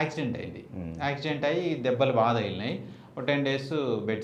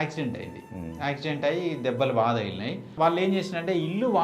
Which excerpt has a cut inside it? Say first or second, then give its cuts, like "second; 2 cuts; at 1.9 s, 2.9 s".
second; 1 cut; at 2.9 s